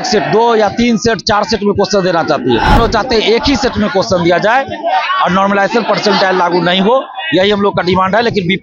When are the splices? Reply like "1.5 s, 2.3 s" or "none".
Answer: 2.8 s